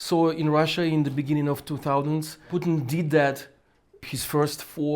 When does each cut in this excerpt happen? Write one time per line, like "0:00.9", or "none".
0:02.4
0:04.0